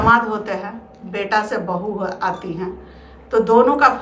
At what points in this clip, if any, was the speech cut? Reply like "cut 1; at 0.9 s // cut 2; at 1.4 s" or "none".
none